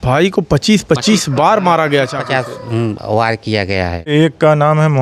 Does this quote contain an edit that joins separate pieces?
yes; 1 cut; at 4.1 s

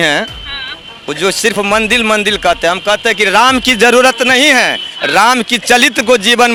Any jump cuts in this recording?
no; 0 cuts

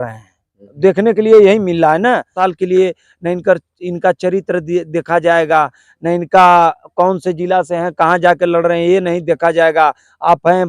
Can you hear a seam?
yes; 1 cut; at 2.3 s

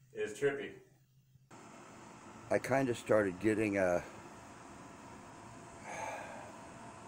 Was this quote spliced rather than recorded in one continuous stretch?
yes; 1 cut; at 1.5 s

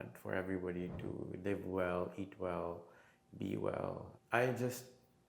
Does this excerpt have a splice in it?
yes; 1 cut; at 4.1 s

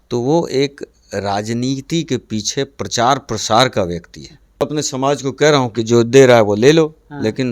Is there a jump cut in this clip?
yes; 1 cut; at 4.6 s

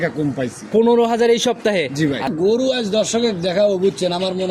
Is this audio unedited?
no; 1 cut; at 2.3 s

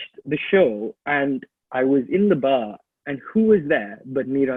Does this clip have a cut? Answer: no; 0 cuts

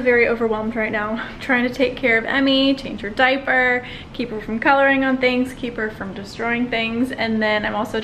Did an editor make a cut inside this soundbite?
no; 0 cuts

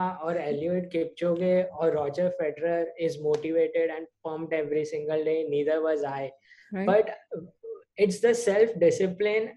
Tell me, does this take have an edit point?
no; 0 cuts

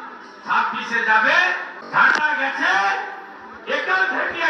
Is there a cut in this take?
yes; 1 cut; at 1.7 s

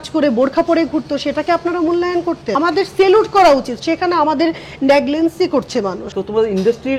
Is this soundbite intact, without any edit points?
no; 2 cuts; at 2.5 s, 6.1 s

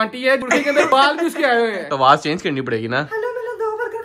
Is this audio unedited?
no; 2 cuts; at 0.9 s, 1.9 s

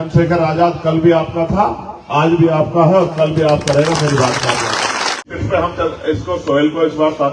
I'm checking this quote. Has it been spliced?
yes; 1 cut; at 5.3 s

